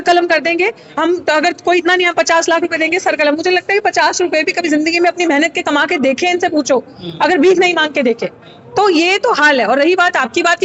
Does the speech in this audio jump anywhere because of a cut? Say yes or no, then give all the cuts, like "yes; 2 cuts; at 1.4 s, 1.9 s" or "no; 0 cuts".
no; 0 cuts